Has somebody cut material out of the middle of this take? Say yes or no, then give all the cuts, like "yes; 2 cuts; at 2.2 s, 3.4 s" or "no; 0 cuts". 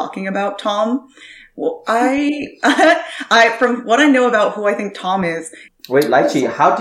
yes; 1 cut; at 5.6 s